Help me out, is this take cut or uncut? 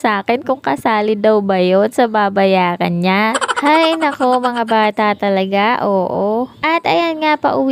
uncut